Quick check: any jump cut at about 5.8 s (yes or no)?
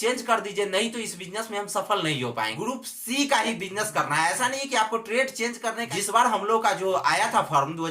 yes